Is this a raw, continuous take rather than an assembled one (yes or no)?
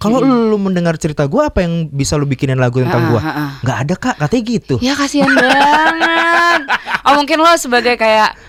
yes